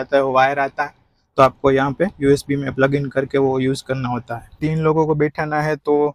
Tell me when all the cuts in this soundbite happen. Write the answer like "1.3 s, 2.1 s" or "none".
4.6 s